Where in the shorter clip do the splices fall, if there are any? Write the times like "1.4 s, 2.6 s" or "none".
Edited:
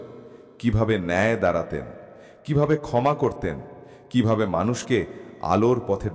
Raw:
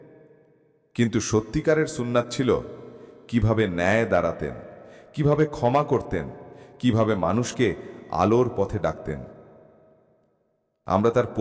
none